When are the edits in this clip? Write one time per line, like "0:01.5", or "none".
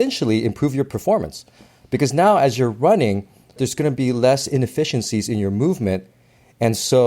0:03.6